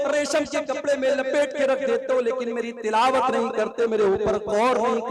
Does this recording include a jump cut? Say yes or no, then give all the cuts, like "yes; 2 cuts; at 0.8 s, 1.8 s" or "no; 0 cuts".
no; 0 cuts